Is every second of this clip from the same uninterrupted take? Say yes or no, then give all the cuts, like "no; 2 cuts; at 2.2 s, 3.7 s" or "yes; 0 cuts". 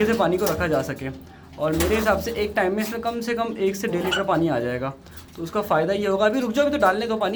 yes; 0 cuts